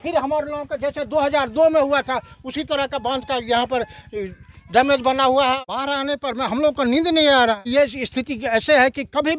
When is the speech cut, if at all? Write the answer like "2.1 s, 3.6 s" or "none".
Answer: 5.6 s, 7.6 s